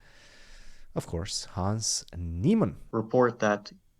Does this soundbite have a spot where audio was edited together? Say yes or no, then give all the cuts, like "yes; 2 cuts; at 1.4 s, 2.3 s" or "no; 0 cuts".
yes; 1 cut; at 2.8 s